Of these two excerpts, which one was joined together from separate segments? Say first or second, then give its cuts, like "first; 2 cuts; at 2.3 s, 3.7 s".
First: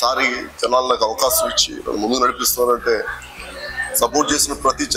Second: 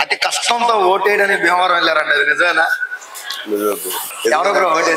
second; 1 cut; at 4.1 s